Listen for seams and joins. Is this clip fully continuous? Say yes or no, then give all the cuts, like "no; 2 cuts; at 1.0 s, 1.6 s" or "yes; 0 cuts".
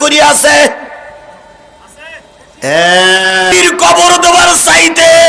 no; 1 cut; at 3.5 s